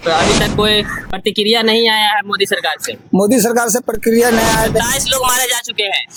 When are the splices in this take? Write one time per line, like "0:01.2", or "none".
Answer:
none